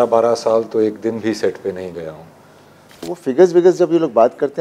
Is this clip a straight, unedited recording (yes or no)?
no